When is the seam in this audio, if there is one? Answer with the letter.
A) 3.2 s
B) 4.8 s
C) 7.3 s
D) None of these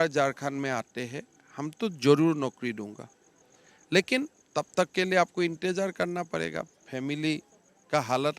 D